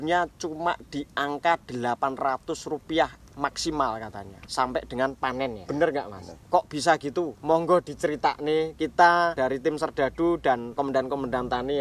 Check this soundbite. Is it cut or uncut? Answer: uncut